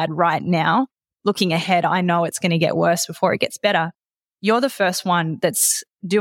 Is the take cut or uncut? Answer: uncut